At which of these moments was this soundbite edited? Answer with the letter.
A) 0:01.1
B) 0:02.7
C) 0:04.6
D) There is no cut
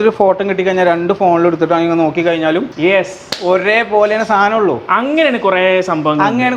B